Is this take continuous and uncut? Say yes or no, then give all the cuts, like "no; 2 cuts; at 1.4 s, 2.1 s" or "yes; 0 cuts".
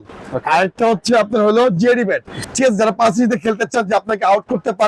no; 1 cut; at 2.4 s